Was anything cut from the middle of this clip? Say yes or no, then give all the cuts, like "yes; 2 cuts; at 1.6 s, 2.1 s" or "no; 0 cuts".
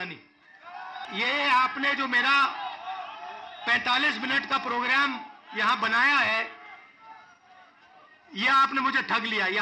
yes; 1 cut; at 1.1 s